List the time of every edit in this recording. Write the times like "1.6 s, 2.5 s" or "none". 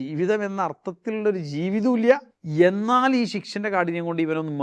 2.4 s

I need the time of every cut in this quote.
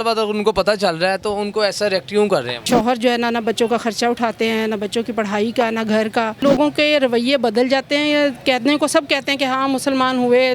2.7 s, 6.4 s

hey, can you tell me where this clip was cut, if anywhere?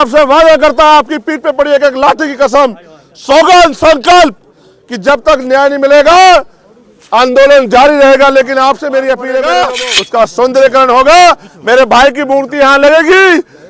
9.4 s

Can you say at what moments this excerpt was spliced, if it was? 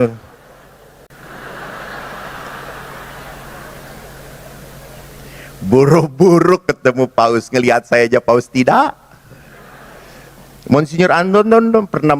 1.1 s

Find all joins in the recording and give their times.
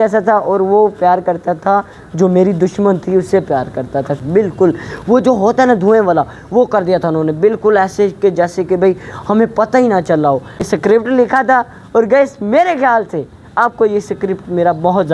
4.2 s, 10.7 s

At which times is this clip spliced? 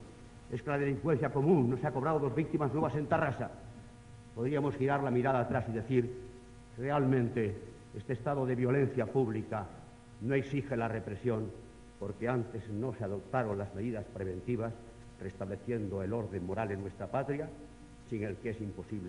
3.1 s

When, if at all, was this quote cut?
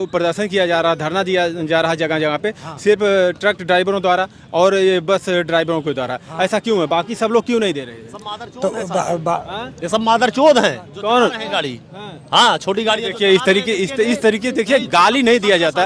none

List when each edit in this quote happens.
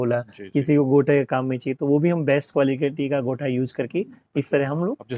none

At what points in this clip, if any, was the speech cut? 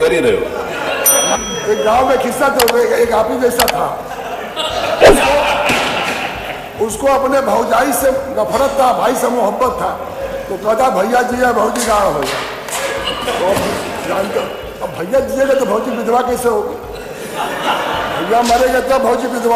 1.3 s

